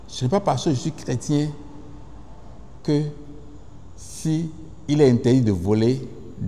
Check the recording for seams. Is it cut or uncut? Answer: uncut